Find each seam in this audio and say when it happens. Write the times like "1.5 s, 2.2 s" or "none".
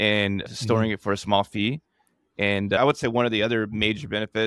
2.8 s